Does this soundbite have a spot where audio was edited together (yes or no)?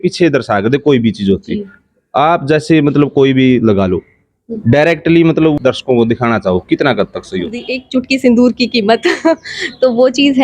yes